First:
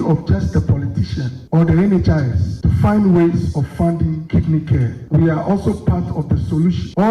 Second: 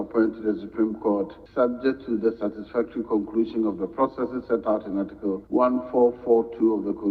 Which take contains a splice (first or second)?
second